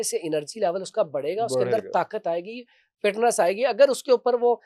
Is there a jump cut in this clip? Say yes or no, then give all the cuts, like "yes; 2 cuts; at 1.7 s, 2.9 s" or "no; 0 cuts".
no; 0 cuts